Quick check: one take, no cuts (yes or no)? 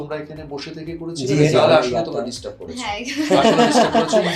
no